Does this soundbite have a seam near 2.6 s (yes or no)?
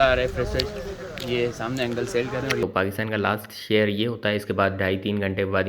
yes